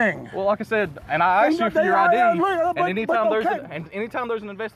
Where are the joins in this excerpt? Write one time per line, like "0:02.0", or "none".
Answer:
none